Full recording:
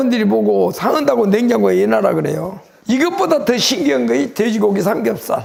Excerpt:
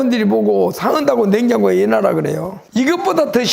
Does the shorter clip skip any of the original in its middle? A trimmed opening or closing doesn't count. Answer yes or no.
yes